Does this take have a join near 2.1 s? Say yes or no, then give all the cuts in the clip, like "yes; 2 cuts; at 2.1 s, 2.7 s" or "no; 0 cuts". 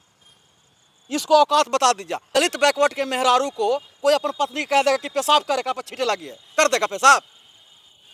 yes; 1 cut; at 2.1 s